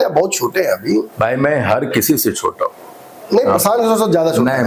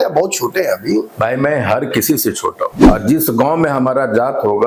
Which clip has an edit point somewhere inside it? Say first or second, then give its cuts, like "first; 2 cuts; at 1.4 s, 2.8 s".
second; 1 cut; at 2.8 s